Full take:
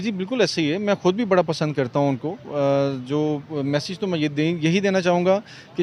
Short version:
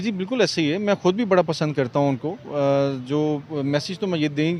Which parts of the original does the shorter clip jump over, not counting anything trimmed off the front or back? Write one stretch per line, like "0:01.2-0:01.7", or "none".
none